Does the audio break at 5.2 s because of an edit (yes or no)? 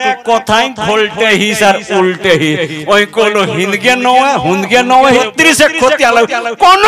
yes